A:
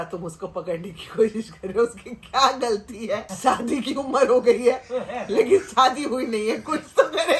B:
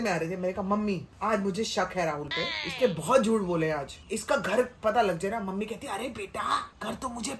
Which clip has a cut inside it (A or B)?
A